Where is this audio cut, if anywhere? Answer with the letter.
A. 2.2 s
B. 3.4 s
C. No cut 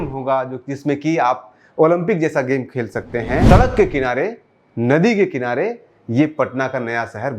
B